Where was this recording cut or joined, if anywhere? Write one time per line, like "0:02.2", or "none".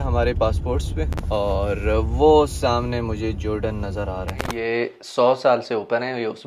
0:01.1
0:04.5